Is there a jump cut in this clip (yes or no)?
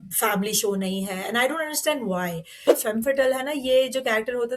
yes